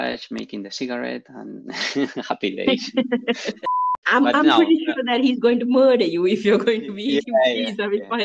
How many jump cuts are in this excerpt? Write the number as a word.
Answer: one